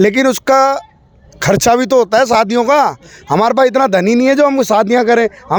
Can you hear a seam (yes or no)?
no